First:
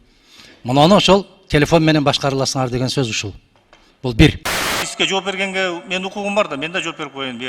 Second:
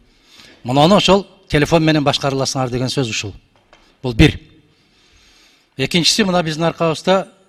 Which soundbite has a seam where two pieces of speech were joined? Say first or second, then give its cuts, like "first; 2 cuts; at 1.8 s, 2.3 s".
first; 1 cut; at 4.9 s